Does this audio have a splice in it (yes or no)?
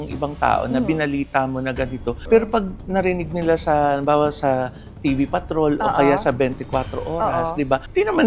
no